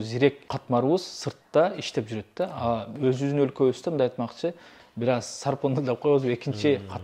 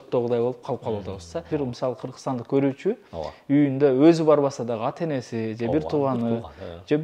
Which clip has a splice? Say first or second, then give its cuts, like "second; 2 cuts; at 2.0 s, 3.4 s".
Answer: second; 1 cut; at 1.5 s